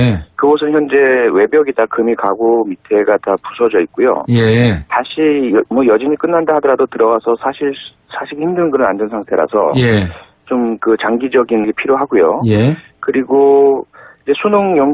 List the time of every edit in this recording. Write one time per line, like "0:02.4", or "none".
0:02.4